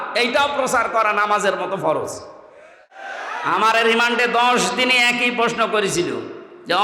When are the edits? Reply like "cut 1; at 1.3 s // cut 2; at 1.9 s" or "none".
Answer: cut 1; at 3.1 s